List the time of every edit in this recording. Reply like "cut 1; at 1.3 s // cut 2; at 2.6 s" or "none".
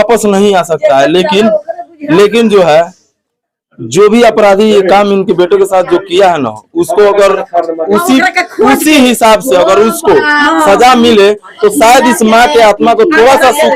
none